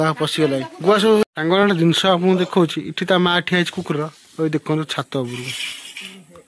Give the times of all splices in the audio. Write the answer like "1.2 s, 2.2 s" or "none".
1.2 s